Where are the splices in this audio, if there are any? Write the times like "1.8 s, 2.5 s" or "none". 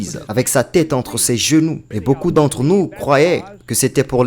1.9 s